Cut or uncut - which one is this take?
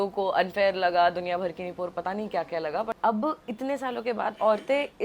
cut